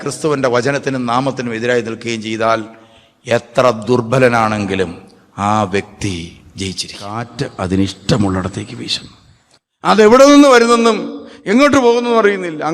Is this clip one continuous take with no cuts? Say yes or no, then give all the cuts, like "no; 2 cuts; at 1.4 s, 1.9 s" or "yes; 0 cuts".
no; 1 cut; at 7.4 s